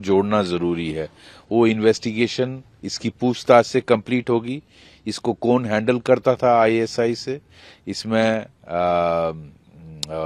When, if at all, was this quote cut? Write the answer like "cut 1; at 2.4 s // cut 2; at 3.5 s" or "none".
none